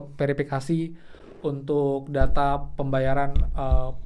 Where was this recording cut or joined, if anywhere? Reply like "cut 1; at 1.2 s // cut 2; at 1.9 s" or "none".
none